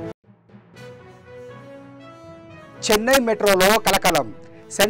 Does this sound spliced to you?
yes; 1 cut; at 2.7 s

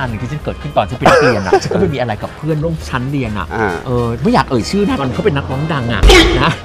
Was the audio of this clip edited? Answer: no; 0 cuts

